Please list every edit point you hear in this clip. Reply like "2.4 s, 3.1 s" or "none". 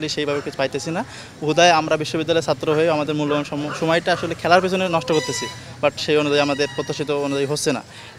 none